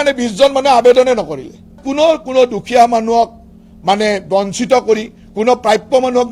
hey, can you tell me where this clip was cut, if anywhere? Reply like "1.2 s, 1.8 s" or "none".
1.8 s